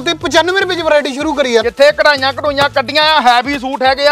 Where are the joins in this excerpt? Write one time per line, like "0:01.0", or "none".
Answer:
0:01.6